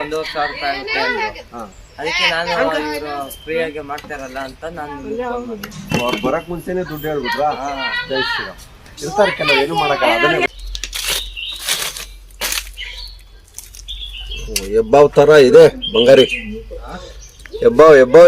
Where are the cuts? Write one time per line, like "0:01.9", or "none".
0:10.5